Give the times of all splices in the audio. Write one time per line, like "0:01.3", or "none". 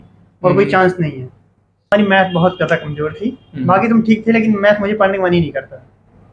0:01.9